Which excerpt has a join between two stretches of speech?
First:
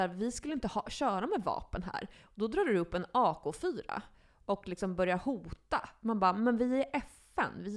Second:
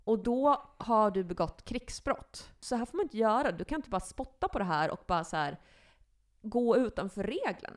second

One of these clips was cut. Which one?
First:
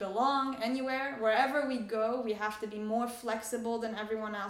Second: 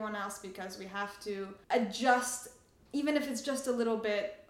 second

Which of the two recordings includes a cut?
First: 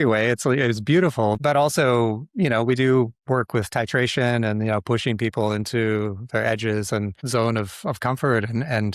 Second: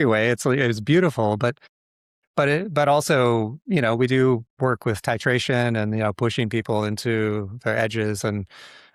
first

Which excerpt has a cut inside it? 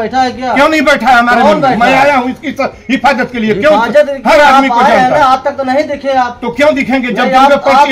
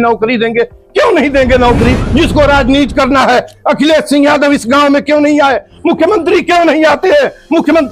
second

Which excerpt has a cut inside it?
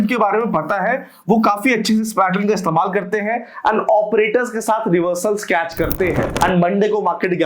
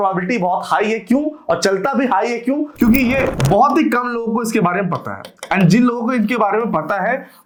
first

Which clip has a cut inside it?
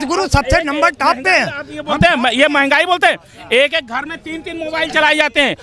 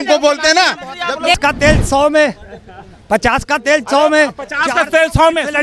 second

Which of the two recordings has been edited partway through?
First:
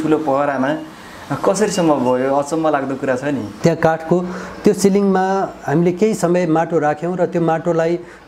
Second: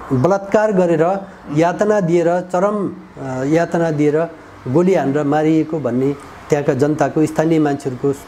first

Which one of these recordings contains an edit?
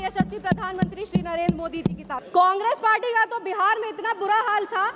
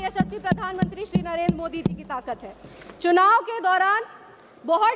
first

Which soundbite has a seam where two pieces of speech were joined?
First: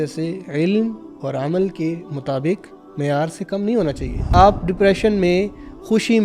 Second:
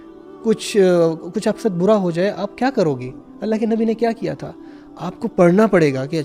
first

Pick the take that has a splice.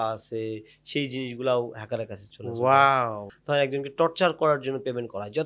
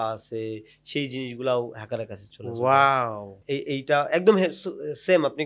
first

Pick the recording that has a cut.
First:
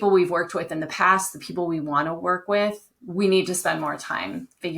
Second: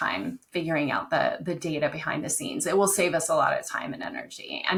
first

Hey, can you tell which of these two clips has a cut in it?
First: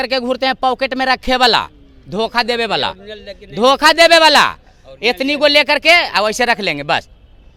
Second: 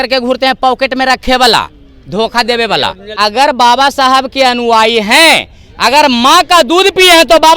second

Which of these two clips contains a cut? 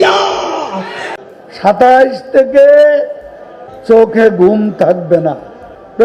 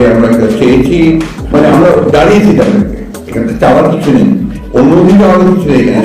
first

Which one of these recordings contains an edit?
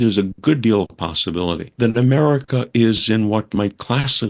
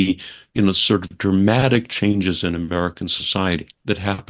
first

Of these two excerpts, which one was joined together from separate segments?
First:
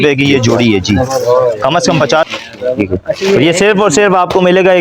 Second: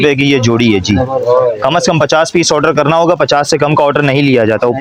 first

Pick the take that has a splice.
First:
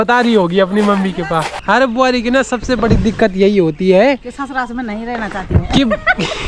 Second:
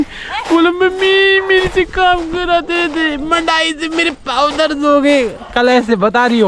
first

